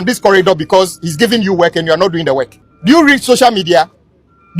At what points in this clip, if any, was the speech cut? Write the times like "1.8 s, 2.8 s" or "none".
2.6 s